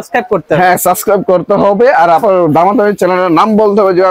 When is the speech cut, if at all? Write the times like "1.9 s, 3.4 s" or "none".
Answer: none